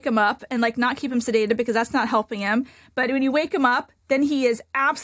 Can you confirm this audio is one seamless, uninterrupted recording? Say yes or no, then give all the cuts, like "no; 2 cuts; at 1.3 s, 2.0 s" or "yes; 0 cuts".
yes; 0 cuts